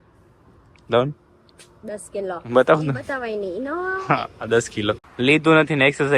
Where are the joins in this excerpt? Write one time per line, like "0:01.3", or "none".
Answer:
0:05.1